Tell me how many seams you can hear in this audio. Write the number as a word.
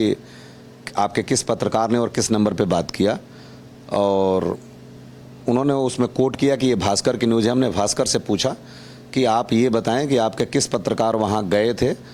zero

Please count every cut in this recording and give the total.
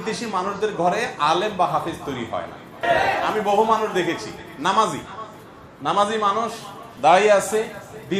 one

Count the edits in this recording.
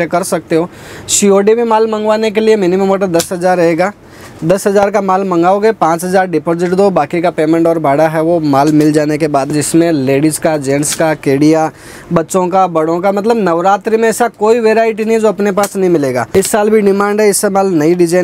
two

